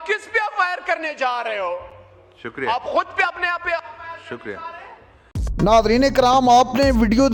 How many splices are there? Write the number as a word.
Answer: zero